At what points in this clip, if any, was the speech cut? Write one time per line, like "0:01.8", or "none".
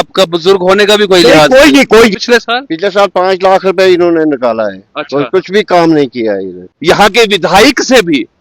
0:02.2
0:06.7